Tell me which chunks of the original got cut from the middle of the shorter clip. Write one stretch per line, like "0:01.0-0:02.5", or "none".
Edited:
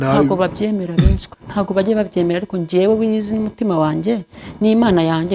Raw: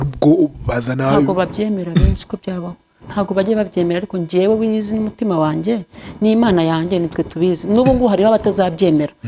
0:02.3-0:02.9

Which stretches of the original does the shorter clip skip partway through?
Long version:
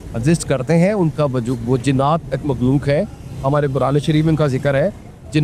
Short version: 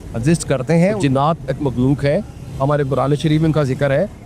0:01.0-0:01.8

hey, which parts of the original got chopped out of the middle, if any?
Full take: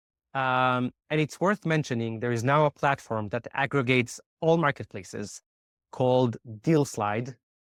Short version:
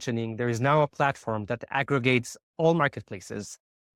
none

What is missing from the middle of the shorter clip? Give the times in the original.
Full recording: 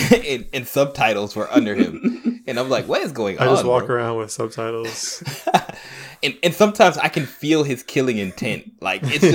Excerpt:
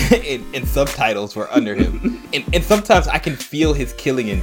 0:02.2-0:06.1

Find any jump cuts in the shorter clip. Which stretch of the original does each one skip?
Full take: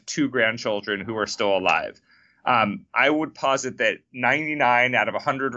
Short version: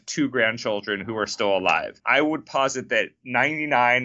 0:02.0-0:02.9

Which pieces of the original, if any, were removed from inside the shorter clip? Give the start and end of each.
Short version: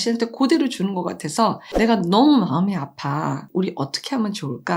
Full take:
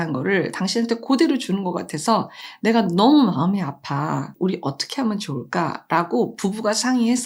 0:02.3-0:02.5

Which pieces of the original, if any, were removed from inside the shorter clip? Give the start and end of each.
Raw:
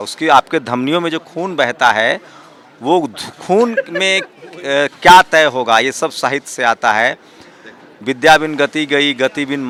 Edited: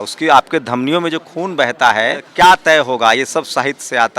0:02.3-0:04.9

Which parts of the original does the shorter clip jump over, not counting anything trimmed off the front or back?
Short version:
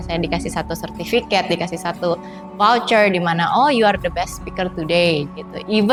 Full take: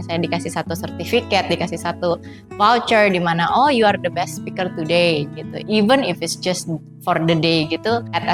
none

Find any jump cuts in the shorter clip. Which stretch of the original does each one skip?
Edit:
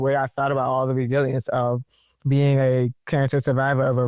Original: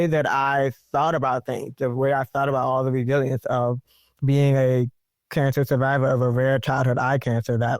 0:05.0-0:05.2

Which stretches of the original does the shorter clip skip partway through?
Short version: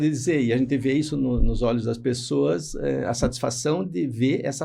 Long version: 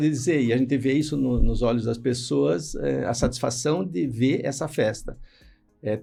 none

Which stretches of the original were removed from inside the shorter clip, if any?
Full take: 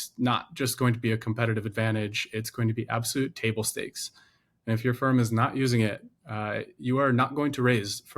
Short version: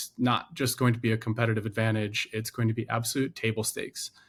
none

